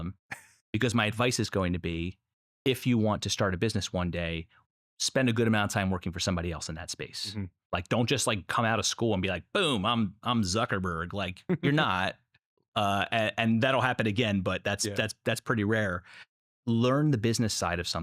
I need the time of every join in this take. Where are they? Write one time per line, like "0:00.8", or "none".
0:16.2